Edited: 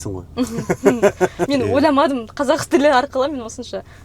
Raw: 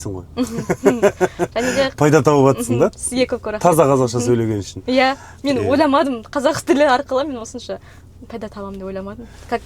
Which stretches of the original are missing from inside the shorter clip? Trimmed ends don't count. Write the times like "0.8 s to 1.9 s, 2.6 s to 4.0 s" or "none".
1.4 s to 5.4 s